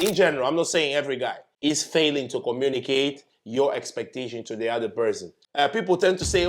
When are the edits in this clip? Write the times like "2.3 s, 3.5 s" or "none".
1.4 s, 5.3 s